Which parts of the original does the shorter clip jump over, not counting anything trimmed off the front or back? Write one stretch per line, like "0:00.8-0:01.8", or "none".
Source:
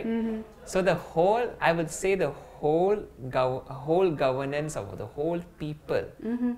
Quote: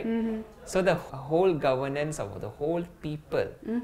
0:01.1-0:03.6

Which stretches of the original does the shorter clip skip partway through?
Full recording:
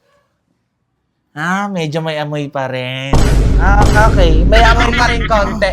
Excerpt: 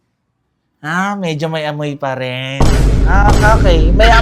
none

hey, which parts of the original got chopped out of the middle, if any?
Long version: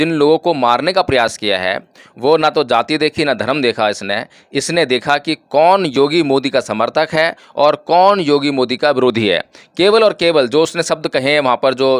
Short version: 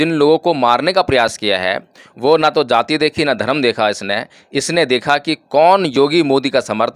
none

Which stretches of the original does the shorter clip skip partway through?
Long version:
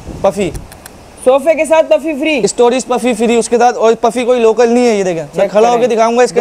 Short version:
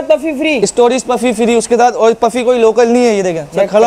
none

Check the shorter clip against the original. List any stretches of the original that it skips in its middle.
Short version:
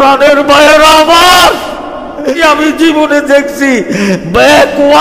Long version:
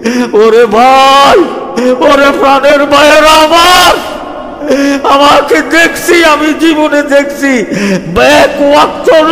0:04.8-0:06.2

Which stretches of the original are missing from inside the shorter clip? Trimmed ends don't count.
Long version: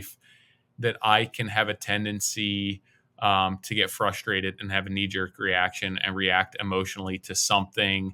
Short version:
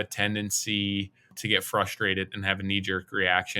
0:03.1-0:03.6

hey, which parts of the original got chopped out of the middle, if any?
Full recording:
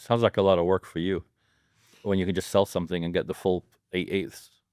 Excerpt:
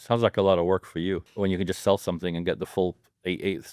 0:01.3-0:02.0

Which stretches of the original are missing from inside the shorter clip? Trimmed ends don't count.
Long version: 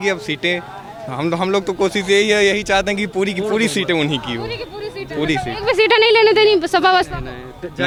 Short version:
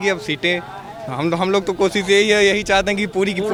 none

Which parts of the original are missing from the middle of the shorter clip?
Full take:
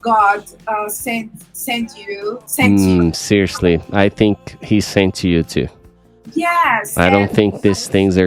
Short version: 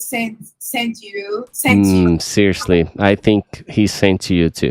none

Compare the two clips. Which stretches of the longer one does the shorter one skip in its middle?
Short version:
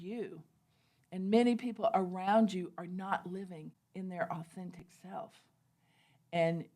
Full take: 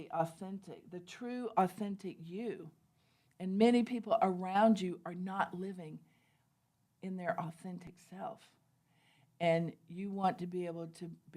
0:06.0-0:06.8

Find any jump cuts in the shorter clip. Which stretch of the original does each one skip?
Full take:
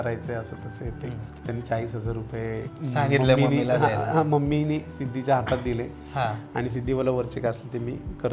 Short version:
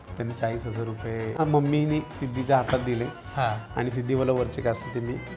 0:02.7-0:04.2

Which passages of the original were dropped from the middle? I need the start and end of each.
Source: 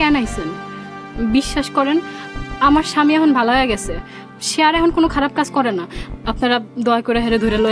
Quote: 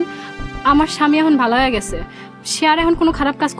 none

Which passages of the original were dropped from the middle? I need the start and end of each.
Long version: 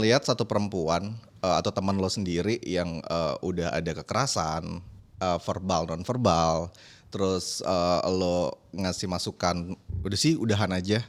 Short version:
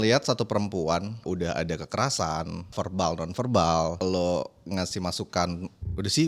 0:01.2-0:03.4
0:04.9-0:05.4
0:06.7-0:08.1

